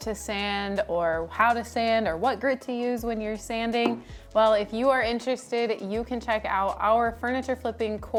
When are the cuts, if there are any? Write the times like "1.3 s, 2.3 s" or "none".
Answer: none